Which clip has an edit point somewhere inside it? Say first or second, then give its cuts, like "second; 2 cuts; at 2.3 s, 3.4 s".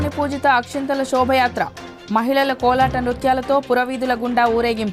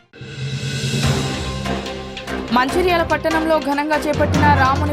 second; 1 cut; at 2.5 s